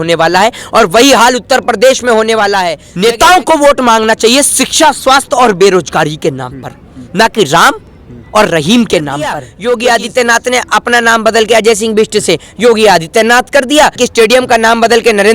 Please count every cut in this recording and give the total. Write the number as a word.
three